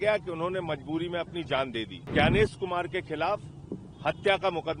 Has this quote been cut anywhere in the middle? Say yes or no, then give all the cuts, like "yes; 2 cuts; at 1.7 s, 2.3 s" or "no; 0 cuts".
yes; 1 cut; at 2.1 s